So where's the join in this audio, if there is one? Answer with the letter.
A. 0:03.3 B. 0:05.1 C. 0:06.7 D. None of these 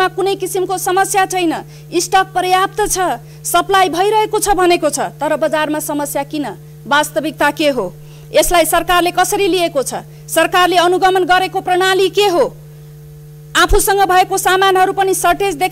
D